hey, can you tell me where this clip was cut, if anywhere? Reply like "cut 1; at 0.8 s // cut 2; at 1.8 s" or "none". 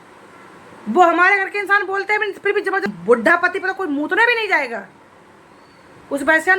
cut 1; at 2.9 s

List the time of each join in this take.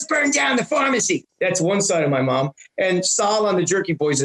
cut 1; at 1.3 s

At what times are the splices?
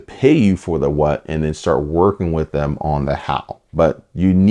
cut 1; at 3.6 s

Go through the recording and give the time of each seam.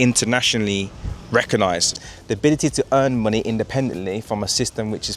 cut 1; at 1.9 s

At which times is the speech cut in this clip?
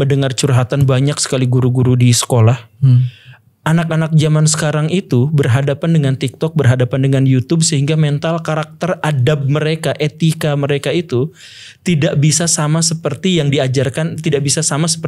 none

